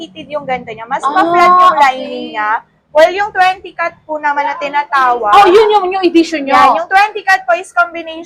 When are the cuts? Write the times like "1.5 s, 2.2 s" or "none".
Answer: none

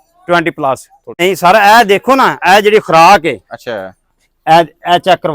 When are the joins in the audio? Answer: 1.2 s

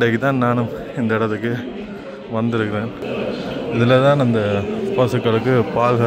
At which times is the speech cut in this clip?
3.0 s

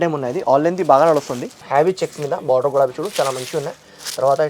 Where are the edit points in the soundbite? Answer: 1.5 s

